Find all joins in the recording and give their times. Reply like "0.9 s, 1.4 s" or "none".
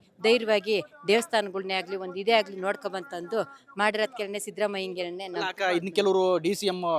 none